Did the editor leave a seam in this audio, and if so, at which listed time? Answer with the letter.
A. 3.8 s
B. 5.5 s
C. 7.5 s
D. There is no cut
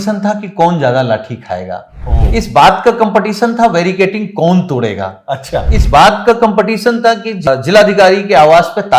C